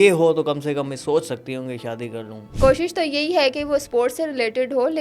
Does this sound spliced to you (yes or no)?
yes